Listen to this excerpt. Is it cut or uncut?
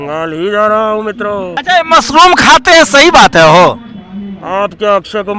cut